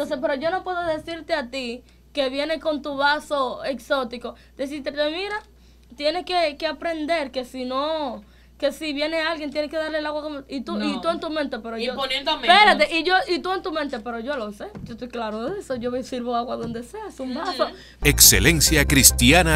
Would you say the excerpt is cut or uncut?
cut